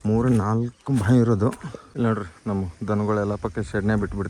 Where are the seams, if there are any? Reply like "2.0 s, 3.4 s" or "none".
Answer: 1.8 s

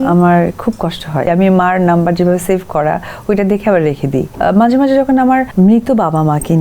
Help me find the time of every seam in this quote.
1.3 s, 4.3 s, 5.5 s

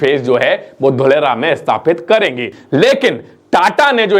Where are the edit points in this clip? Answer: 2.6 s

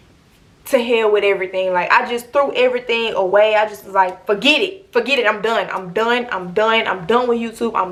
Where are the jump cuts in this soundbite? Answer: none

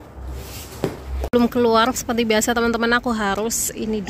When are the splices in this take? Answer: 1.3 s

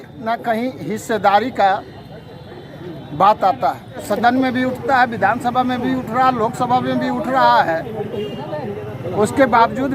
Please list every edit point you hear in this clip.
4.0 s

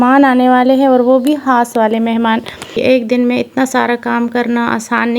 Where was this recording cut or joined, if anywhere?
2.7 s

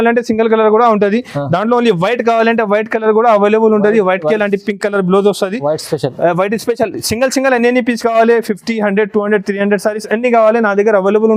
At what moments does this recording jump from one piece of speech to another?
none

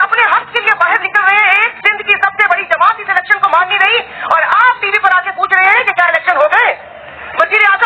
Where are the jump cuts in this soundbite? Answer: none

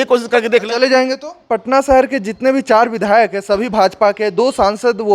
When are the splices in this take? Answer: 1.4 s

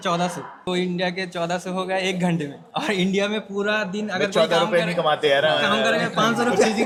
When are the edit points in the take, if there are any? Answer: none

